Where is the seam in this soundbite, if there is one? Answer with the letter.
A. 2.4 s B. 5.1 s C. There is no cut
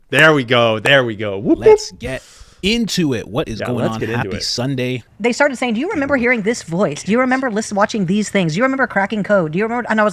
B